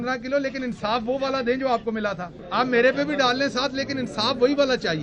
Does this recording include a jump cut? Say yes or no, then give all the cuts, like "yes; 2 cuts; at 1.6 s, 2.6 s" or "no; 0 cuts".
yes; 1 cut; at 2.4 s